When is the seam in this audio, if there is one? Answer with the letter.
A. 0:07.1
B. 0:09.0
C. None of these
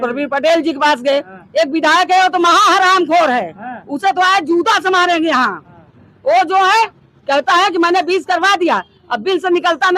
C